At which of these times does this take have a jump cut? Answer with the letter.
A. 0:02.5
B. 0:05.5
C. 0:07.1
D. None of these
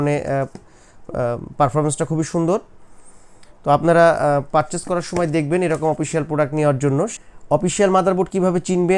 C